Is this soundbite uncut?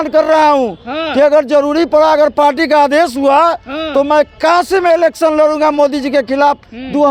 yes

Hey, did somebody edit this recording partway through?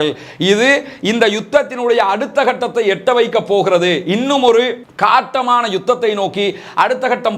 no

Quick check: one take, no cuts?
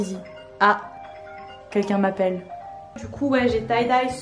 no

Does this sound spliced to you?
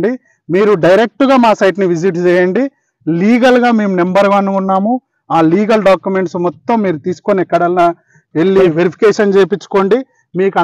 no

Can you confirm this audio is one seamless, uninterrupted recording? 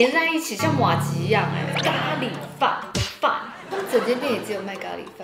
no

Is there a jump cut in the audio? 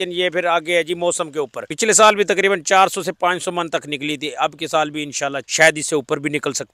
yes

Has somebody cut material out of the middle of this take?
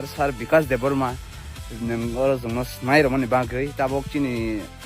no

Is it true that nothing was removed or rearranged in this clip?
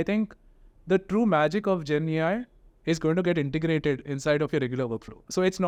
yes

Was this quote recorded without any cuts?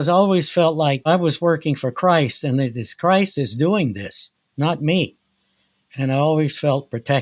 no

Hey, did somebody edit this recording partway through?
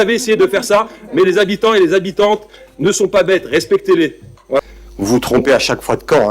yes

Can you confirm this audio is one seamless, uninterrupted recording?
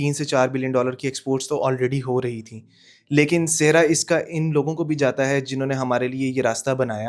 yes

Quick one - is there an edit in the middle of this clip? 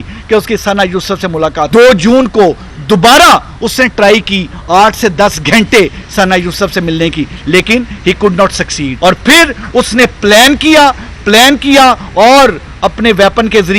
yes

